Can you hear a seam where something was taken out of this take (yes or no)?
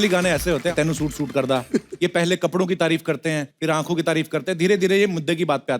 yes